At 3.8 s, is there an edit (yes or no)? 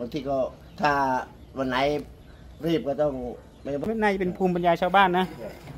yes